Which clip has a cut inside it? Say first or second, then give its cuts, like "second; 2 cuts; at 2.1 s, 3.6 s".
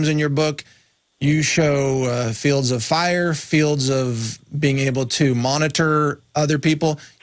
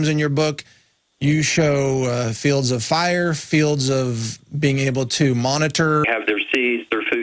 first; 1 cut; at 6.0 s